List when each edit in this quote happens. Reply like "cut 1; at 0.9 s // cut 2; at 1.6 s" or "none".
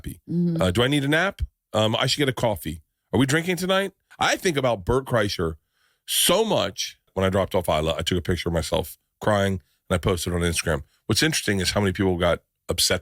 cut 1; at 4.0 s // cut 2; at 7.1 s